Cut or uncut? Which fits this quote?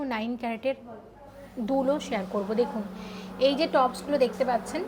uncut